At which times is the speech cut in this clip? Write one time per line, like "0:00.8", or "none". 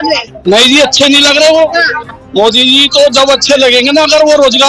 none